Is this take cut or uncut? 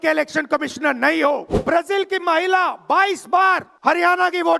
cut